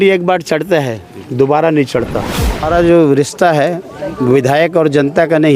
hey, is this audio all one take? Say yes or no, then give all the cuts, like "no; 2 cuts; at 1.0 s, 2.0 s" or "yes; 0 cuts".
no; 1 cut; at 2.7 s